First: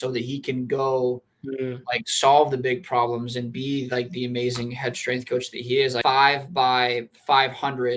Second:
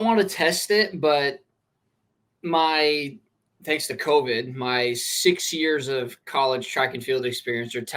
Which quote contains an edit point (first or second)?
first